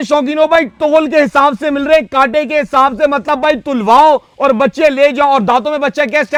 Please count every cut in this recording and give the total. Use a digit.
0